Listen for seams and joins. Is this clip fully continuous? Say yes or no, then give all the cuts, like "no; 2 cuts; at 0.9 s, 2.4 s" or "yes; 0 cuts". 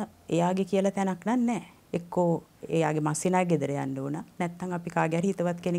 no; 1 cut; at 1.7 s